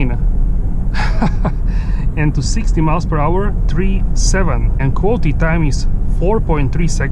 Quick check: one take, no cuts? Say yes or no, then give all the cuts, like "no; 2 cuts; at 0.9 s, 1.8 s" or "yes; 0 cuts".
yes; 0 cuts